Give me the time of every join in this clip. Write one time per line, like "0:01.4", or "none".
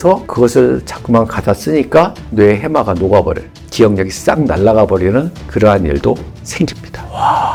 none